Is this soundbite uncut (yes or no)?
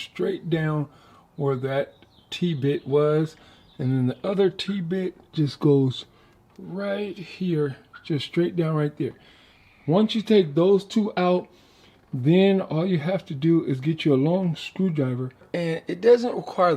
yes